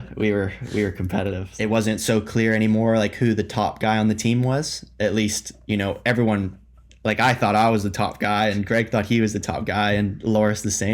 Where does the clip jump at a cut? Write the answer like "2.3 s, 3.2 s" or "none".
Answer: 1.5 s